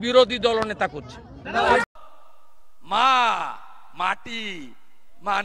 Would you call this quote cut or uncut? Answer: cut